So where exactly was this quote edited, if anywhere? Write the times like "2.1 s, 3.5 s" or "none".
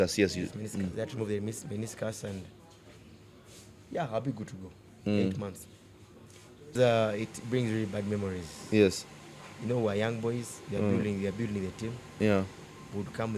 6.7 s